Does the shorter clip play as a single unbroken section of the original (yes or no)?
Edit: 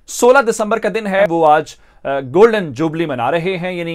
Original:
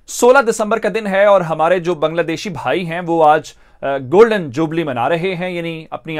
no